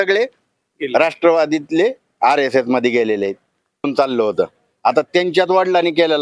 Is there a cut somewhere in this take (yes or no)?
yes